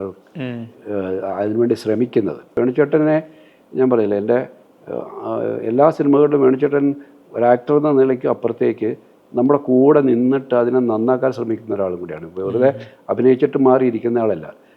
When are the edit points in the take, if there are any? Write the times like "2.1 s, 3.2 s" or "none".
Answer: 2.5 s